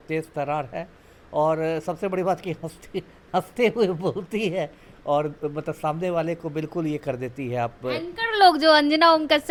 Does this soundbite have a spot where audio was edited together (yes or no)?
no